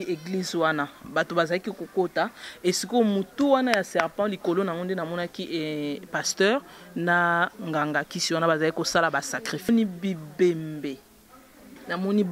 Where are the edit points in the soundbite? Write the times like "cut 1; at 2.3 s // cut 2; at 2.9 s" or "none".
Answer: cut 1; at 9.7 s